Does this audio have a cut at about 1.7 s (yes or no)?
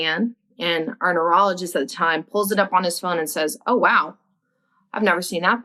no